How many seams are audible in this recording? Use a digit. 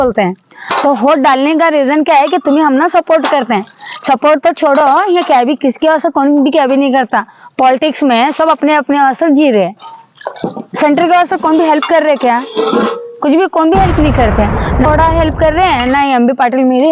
1